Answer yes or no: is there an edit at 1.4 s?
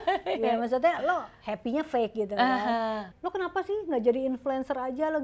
no